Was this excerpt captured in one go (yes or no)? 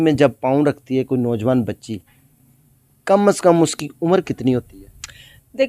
yes